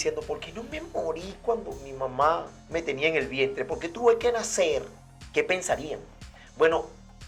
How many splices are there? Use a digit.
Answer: 0